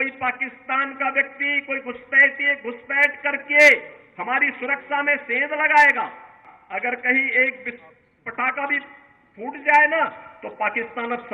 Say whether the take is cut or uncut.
cut